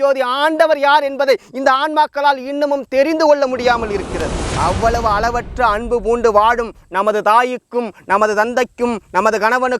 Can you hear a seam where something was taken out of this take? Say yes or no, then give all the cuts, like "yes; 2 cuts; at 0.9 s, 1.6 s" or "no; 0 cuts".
yes; 1 cut; at 4.5 s